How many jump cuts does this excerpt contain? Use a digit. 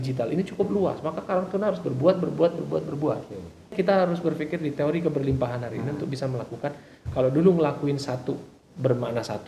1